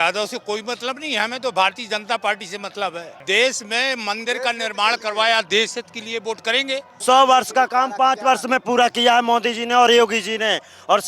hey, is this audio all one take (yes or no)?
no